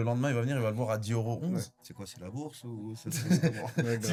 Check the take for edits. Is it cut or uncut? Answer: uncut